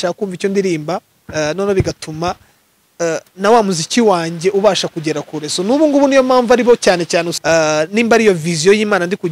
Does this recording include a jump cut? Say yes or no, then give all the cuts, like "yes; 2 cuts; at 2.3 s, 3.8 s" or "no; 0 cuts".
yes; 1 cut; at 7.3 s